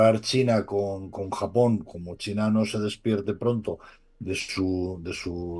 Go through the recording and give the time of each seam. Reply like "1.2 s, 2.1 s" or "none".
none